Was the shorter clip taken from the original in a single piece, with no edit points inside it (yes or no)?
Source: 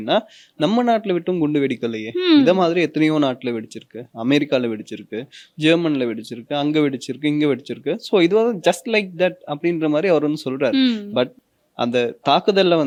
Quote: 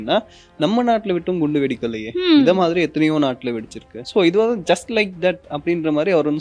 no